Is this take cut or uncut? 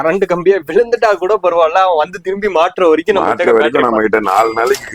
uncut